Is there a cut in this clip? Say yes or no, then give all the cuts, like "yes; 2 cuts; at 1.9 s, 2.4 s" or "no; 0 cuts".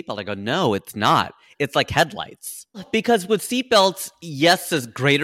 yes; 1 cut; at 2.8 s